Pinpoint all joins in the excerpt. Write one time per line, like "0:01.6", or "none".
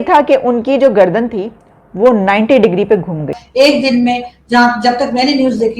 0:03.4